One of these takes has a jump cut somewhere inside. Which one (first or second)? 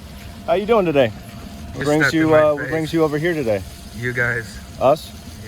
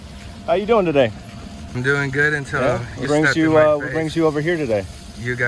first